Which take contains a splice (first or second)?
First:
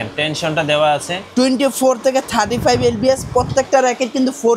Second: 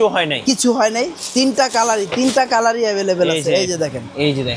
second